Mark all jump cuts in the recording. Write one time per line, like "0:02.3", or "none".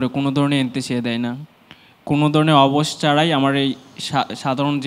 none